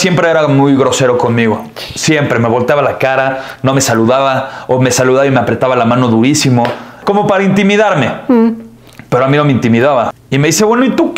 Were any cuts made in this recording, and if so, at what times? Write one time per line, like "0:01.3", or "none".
0:07.0
0:10.2